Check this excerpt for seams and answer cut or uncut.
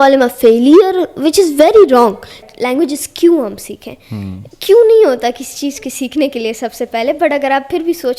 cut